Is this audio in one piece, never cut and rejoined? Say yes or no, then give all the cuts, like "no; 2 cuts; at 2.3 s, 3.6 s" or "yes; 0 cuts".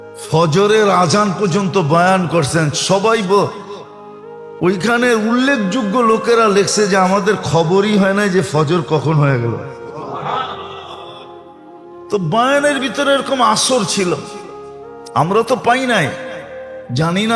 yes; 0 cuts